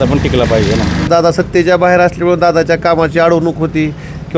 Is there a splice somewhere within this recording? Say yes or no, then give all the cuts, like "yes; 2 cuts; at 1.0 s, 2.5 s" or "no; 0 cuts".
yes; 1 cut; at 1.1 s